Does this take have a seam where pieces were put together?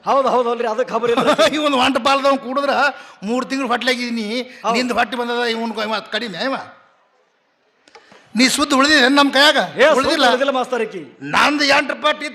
no; 0 cuts

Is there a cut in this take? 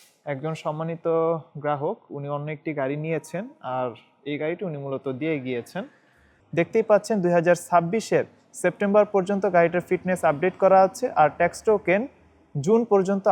yes; 1 cut; at 6.3 s

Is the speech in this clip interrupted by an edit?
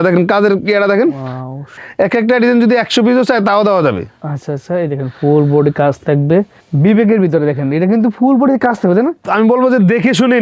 yes; 3 cuts; at 1.8 s, 6.6 s, 9.2 s

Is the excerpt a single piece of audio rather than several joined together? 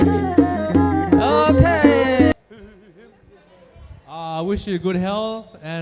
no; 1 cut; at 2.3 s

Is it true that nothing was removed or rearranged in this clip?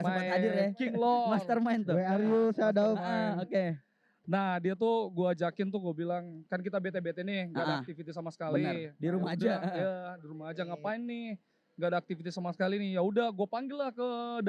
yes; 0 cuts

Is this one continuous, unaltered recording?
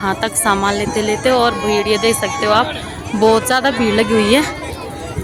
yes; 0 cuts

